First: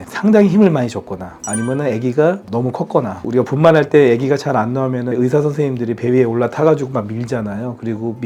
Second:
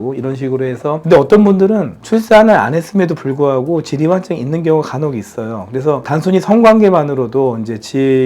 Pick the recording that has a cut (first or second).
second